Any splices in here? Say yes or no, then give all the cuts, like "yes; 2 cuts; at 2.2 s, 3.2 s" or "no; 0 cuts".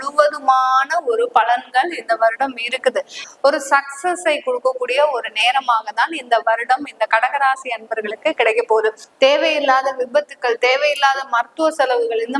yes; 2 cuts; at 3.2 s, 9.0 s